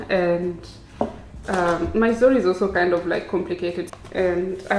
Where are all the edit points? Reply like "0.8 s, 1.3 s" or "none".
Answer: 3.8 s